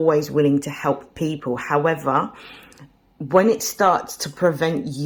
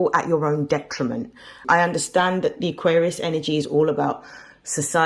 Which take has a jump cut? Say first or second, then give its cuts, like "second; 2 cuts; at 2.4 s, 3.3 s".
second; 1 cut; at 1.6 s